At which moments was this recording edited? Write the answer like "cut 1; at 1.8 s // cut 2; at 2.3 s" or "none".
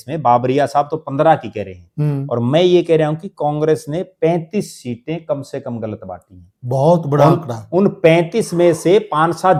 none